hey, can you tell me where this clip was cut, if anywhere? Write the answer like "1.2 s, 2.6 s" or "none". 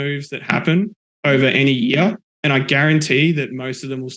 1.0 s

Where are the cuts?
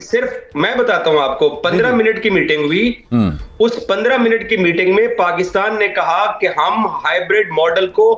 none

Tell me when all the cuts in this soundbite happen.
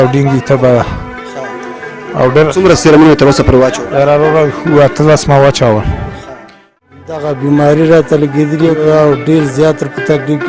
6.8 s

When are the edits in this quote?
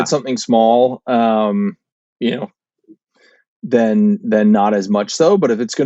none

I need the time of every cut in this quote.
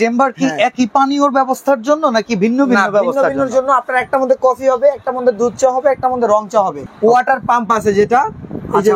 6.8 s

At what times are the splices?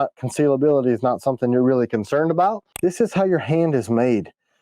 2.7 s

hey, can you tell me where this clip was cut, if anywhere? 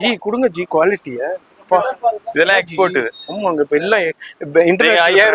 none

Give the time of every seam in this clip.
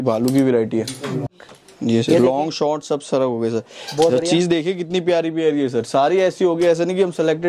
1.3 s

